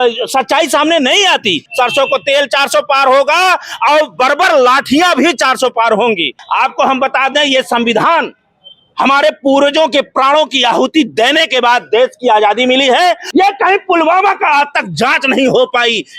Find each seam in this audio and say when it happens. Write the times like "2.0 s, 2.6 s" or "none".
1.6 s, 6.4 s, 13.2 s